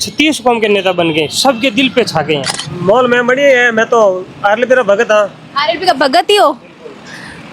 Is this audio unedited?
no; 1 cut; at 2.5 s

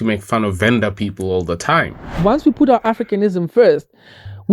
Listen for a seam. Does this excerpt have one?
yes; 1 cut; at 2.2 s

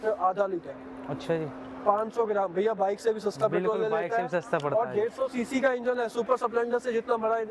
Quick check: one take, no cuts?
yes; 0 cuts

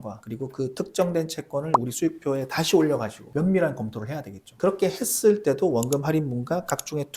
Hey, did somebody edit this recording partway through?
no; 0 cuts

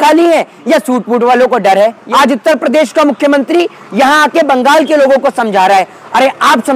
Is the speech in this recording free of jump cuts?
no; 1 cut; at 2.0 s

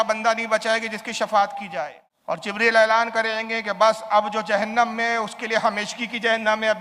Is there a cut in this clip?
yes; 1 cut; at 2.5 s

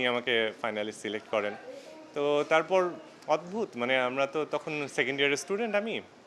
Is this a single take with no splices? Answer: yes; 0 cuts

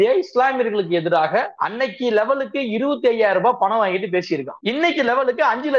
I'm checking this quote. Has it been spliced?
yes; 2 cuts; at 1.6 s, 4.5 s

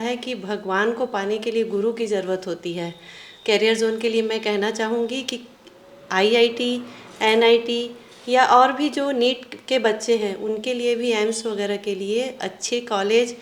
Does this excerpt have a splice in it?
no; 0 cuts

